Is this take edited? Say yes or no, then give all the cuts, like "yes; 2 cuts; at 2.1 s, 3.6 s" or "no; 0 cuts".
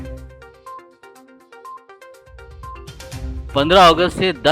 no; 0 cuts